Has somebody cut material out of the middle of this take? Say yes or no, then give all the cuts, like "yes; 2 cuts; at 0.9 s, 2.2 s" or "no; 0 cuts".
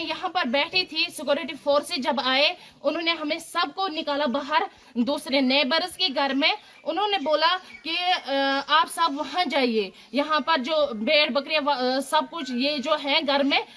no; 0 cuts